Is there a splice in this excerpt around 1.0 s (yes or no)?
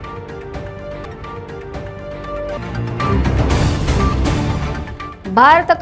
yes